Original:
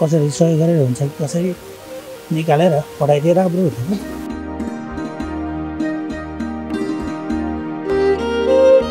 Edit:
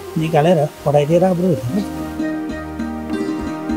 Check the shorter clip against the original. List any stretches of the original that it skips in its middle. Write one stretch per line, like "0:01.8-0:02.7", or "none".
0:04.1-0:05.5